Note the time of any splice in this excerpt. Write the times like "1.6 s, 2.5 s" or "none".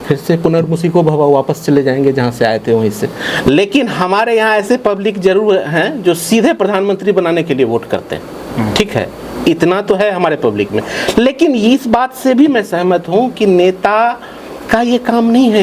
3.4 s